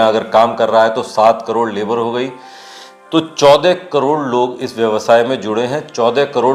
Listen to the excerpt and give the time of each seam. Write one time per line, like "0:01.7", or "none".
none